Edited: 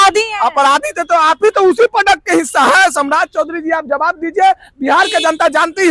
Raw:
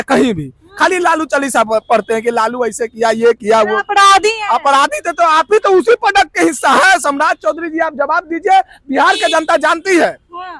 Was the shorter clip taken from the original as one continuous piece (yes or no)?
yes